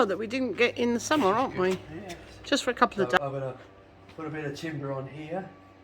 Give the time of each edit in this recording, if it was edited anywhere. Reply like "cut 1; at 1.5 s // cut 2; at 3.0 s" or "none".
cut 1; at 3.2 s